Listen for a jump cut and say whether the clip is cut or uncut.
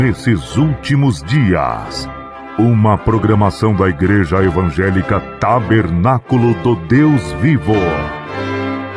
cut